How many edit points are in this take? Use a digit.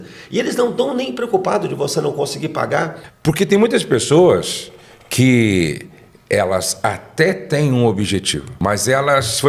2